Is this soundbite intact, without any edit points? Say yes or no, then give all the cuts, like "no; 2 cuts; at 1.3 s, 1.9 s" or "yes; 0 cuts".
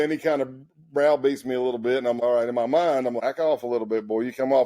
no; 2 cuts; at 2.2 s, 3.2 s